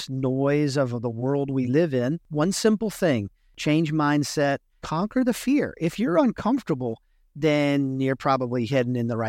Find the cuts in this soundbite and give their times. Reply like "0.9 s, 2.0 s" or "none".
2.3 s, 4.8 s

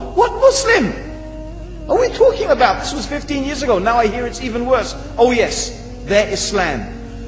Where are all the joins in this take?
6.1 s

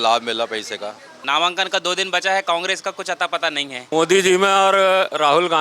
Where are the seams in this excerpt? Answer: 1.1 s, 3.9 s

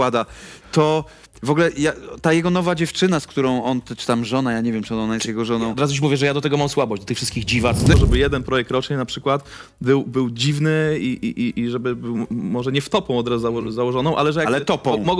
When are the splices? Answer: 7.9 s

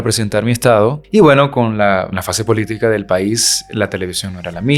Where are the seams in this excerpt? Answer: 1.0 s, 2.2 s

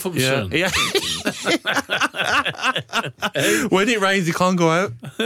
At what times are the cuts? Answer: none

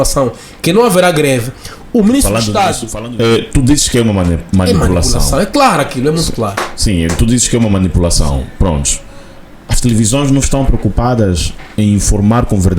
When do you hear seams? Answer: 2.9 s

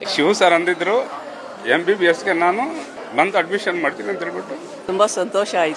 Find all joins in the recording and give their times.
3.0 s, 4.8 s

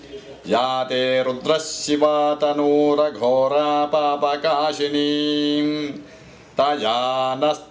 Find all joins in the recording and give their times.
none

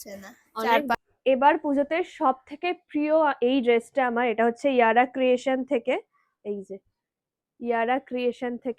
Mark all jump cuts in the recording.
0.9 s

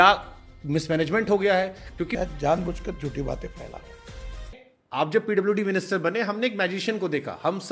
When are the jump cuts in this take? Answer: 2.1 s, 4.7 s

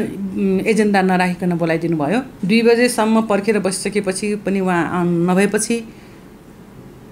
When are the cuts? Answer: 2.3 s

